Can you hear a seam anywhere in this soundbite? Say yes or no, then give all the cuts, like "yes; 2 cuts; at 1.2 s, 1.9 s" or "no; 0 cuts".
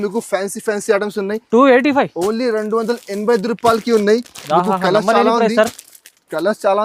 no; 0 cuts